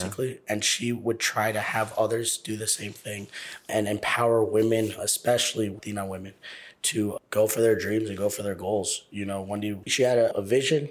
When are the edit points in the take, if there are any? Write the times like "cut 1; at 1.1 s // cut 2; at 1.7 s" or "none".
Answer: cut 1; at 5.8 s // cut 2; at 9.9 s